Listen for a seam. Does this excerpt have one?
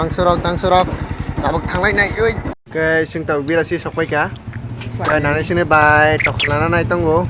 yes; 1 cut; at 2.5 s

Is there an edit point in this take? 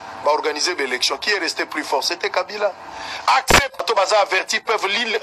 yes; 1 cut; at 3.8 s

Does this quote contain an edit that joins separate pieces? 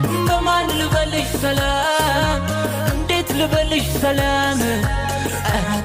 no; 0 cuts

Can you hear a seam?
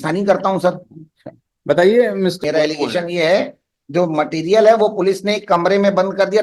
yes; 1 cut; at 2.4 s

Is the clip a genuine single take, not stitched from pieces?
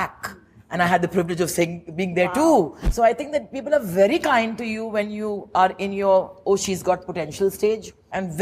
no; 1 cut; at 2.8 s

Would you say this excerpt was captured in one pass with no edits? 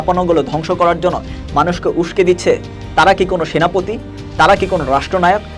yes; 0 cuts

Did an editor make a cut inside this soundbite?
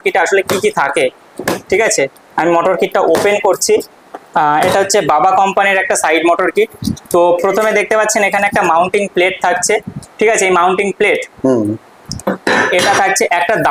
no; 0 cuts

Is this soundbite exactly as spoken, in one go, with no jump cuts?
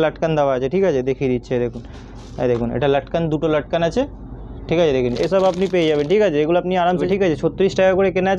no; 2 cuts; at 5.2 s, 7.0 s

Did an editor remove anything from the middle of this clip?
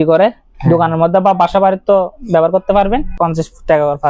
yes; 1 cut; at 3.1 s

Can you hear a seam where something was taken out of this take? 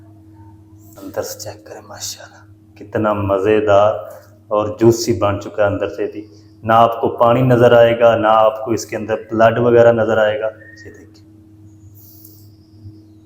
yes; 2 cuts; at 0.9 s, 11.2 s

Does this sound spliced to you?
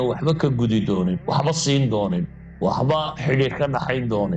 no; 0 cuts

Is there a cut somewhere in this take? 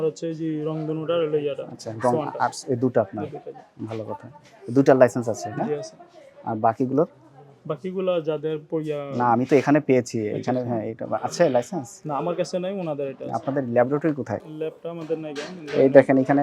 yes; 1 cut; at 14.5 s

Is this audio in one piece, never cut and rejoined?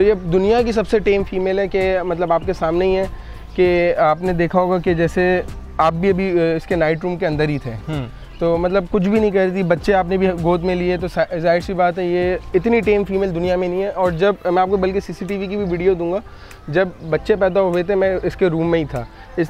yes; 0 cuts

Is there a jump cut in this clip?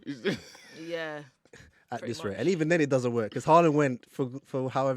no; 0 cuts

